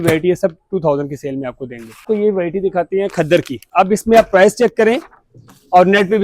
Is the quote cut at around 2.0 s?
yes; 2 cuts; at 2.0 s, 3.6 s

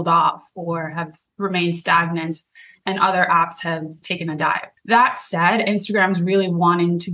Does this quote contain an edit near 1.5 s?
no; 1 cut; at 4.7 s

